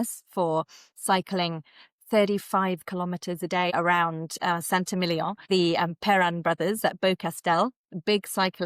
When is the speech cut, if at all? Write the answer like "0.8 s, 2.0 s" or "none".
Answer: 3.7 s, 5.4 s